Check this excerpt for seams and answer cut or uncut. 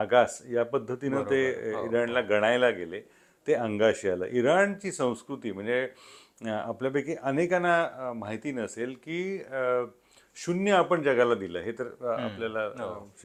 uncut